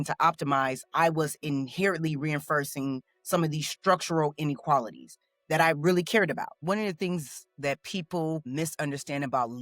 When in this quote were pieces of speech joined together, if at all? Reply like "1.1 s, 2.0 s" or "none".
6.5 s